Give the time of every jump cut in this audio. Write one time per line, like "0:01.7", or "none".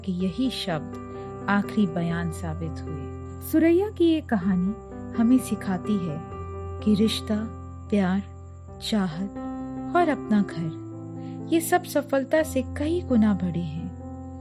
0:03.4